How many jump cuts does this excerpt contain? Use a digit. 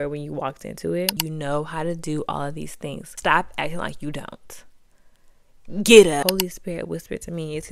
3